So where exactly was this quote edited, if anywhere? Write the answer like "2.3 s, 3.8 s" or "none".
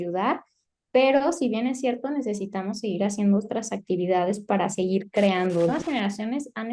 5.7 s